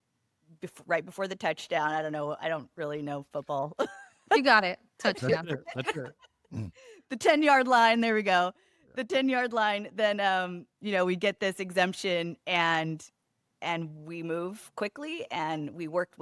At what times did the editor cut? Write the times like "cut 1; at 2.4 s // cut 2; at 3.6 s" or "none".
none